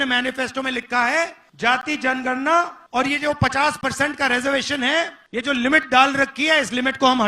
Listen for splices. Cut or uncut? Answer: cut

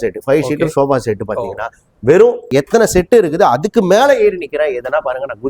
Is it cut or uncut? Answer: cut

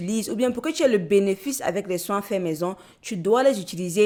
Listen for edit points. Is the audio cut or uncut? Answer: uncut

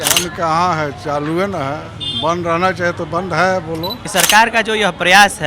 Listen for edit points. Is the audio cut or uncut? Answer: cut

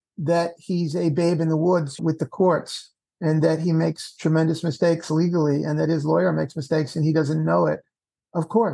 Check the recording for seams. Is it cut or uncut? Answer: uncut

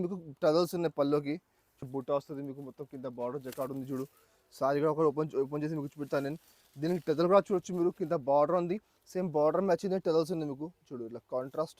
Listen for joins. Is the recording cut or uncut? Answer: cut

